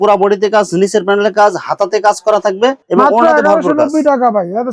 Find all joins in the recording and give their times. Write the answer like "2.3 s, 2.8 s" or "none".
none

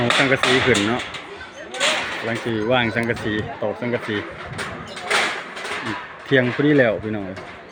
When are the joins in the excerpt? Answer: none

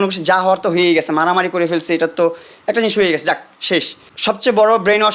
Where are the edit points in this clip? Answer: 4.0 s

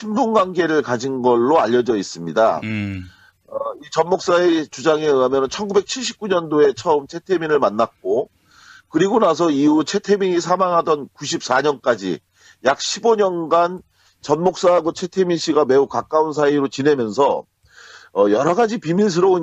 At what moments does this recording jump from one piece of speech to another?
none

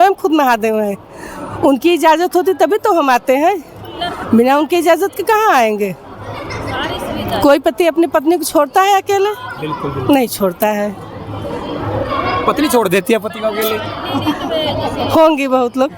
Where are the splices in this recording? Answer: none

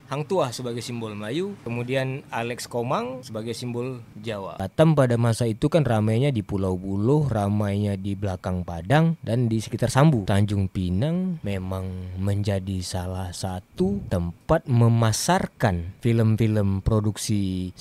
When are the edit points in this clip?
4.6 s

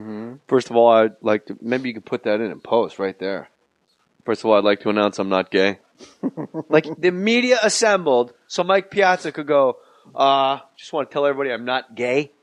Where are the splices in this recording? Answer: none

